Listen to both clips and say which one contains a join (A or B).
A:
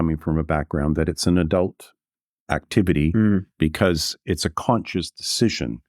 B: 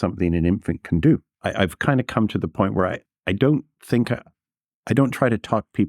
B